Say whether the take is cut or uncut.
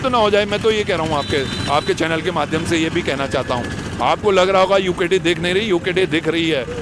uncut